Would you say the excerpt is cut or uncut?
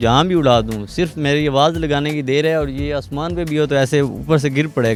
uncut